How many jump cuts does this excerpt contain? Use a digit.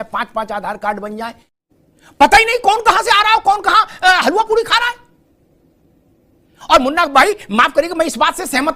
1